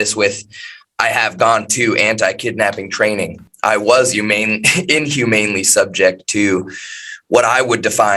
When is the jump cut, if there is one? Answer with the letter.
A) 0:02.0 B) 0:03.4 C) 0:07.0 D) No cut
B